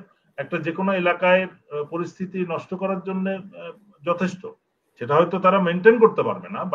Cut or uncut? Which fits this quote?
uncut